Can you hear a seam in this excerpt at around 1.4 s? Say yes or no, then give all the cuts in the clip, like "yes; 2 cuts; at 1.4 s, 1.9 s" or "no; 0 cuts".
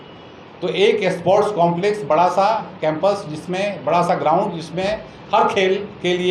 no; 0 cuts